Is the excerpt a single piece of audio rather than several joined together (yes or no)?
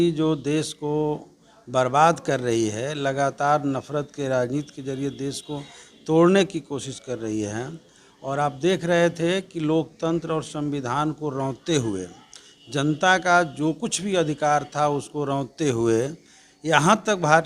yes